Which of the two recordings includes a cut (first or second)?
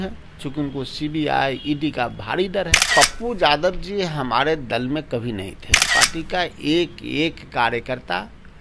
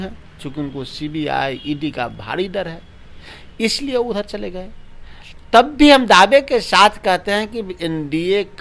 first